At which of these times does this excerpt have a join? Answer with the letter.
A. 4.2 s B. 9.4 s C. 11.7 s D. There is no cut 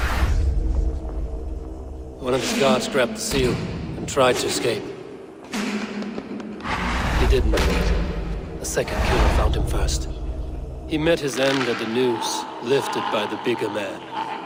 D